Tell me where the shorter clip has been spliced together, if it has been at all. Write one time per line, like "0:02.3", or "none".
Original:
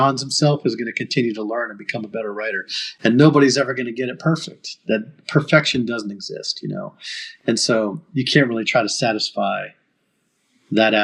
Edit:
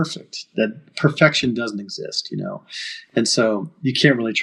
none